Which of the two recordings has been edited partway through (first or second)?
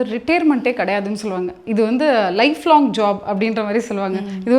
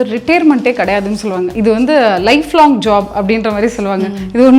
second